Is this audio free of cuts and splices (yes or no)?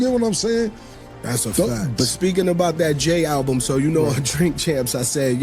no